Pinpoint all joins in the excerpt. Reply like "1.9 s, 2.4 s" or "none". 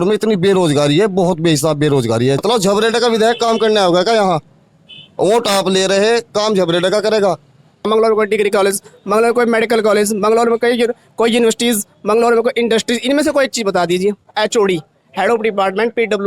2.4 s, 7.8 s, 14.3 s